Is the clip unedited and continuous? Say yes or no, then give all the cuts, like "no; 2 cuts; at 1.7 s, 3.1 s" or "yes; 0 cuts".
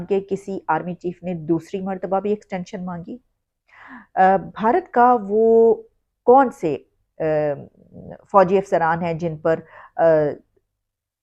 yes; 0 cuts